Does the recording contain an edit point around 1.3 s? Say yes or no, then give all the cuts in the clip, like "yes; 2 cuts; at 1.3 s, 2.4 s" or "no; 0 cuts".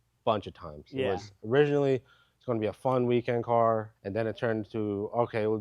no; 1 cut; at 4.0 s